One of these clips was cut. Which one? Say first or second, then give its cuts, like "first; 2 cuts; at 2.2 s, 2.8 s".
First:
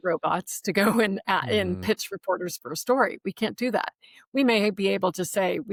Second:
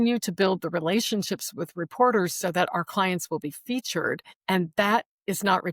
second; 1 cut; at 4.3 s